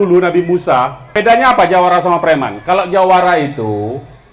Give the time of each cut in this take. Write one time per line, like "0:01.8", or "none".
0:01.1